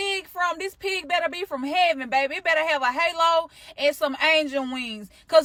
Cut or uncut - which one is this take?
uncut